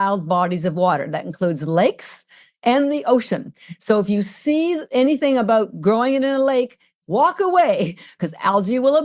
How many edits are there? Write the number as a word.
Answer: two